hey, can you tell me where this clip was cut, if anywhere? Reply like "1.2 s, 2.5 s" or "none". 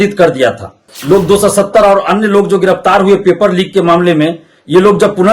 0.9 s